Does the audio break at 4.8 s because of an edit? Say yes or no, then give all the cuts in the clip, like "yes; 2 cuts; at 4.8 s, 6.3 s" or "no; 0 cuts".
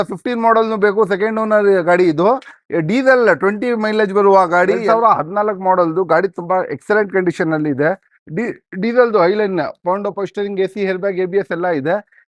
yes; 1 cut; at 4.8 s